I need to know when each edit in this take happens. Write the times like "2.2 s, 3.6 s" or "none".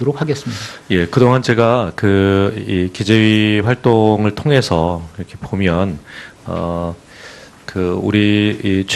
2.1 s

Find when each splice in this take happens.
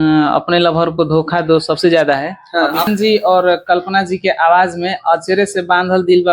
2.8 s

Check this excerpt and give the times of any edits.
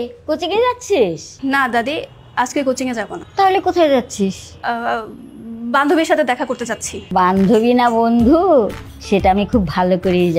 1.3 s, 3.2 s, 4.5 s, 6.9 s

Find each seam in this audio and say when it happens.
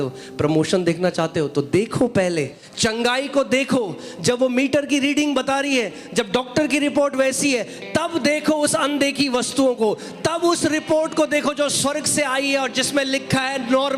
2.6 s

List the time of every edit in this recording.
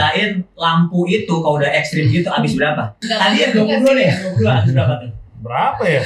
3.0 s

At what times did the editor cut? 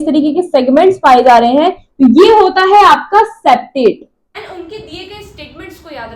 4.4 s

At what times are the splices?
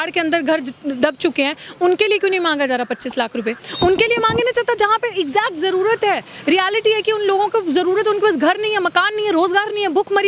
3.6 s

